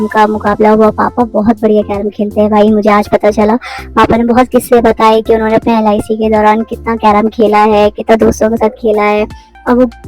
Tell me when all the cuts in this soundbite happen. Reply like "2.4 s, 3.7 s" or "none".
none